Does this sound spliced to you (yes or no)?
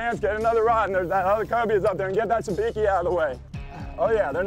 no